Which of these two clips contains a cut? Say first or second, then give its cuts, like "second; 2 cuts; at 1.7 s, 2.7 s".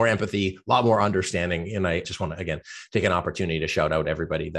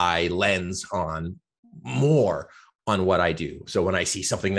first; 1 cut; at 2.1 s